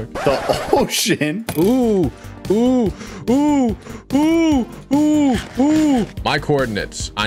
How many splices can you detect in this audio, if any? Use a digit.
1